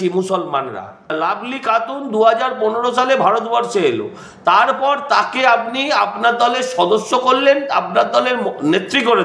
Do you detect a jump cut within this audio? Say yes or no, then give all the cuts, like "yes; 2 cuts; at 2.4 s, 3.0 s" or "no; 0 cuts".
yes; 1 cut; at 1.2 s